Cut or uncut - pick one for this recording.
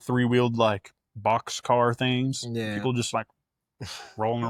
uncut